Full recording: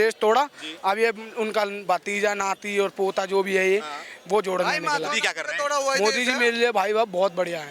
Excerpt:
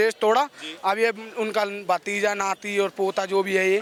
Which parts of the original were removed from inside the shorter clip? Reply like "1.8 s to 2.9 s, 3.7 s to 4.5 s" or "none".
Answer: none